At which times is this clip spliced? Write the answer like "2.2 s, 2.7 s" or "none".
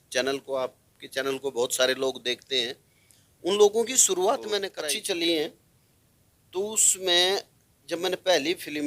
4.8 s